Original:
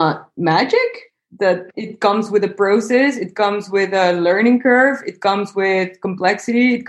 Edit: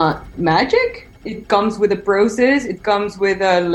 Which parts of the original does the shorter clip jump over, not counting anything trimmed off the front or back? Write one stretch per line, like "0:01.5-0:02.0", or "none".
0:01.2-0:01.7